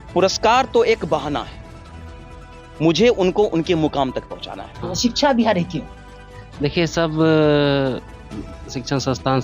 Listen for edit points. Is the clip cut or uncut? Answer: cut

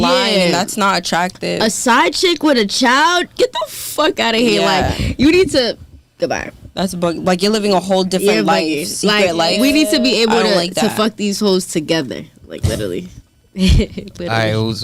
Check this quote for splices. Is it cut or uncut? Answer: uncut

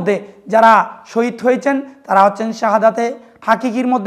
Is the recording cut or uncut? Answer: uncut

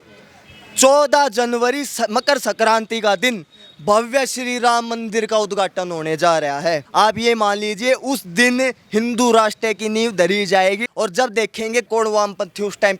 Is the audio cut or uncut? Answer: cut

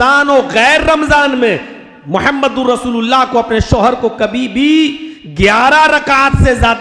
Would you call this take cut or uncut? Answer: uncut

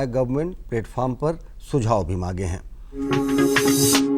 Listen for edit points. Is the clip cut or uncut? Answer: cut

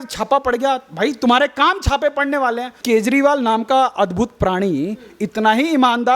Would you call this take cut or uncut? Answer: cut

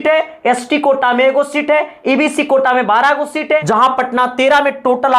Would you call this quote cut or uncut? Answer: cut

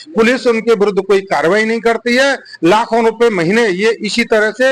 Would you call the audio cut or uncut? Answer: uncut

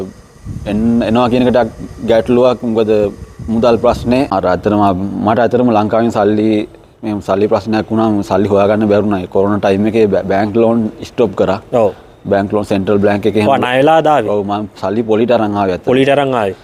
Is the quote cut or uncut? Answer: cut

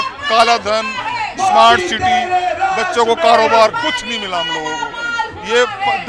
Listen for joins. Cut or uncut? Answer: uncut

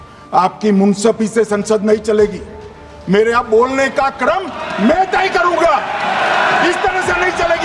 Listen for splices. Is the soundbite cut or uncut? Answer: uncut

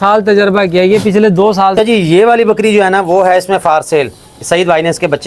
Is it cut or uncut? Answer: cut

